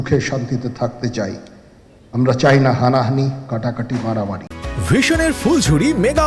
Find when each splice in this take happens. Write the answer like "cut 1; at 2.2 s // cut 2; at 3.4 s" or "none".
none